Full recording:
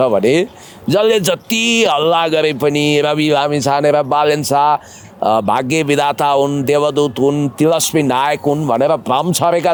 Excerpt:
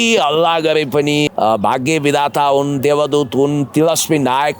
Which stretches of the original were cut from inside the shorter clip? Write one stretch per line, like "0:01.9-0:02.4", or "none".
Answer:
0:02.9-0:05.1